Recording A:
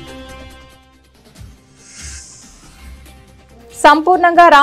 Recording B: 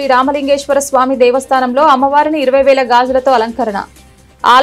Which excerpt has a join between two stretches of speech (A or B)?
A